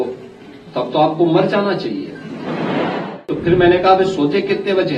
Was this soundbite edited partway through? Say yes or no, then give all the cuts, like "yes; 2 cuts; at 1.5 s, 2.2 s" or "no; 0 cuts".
yes; 1 cut; at 3.3 s